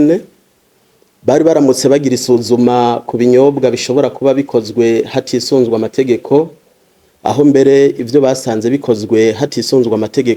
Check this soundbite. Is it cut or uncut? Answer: uncut